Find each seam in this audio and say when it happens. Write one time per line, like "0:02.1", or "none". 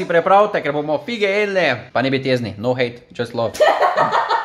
0:01.8
0:03.5